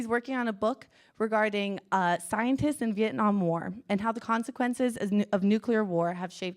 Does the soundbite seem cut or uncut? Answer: cut